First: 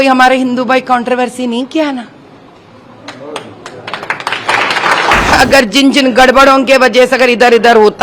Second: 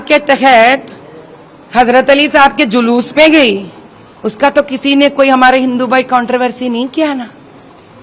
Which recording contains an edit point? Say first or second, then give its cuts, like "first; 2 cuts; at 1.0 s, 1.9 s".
first; 1 cut; at 5.3 s